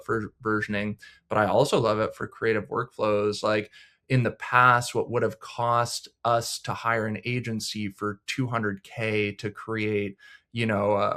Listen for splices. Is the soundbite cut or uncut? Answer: uncut